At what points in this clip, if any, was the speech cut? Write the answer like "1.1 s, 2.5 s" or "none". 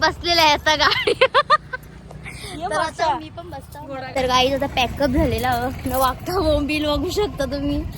4.1 s